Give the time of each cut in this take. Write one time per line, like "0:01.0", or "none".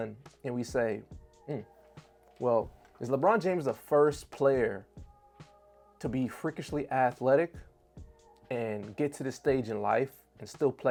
none